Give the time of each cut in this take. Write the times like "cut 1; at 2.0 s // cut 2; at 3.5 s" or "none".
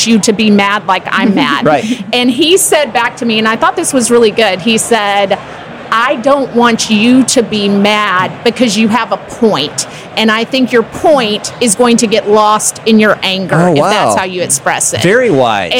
none